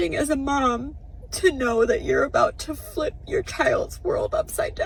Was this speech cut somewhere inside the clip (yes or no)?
no